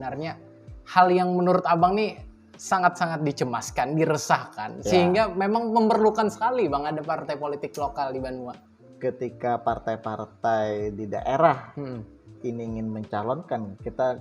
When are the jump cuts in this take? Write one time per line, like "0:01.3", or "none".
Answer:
0:08.5